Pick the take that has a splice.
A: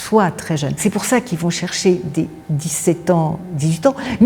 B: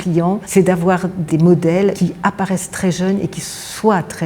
B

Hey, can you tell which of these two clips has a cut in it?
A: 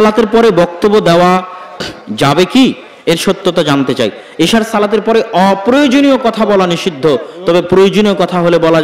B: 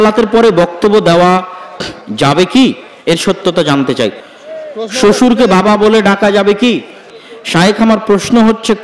B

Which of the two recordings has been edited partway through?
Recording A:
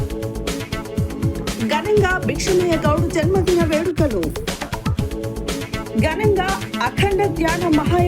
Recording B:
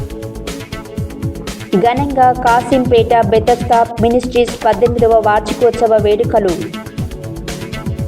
B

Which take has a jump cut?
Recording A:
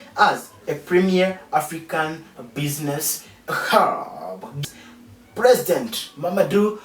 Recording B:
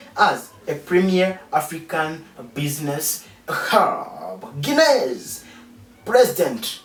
A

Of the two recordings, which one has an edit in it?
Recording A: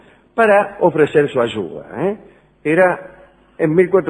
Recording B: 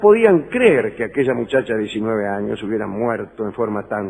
A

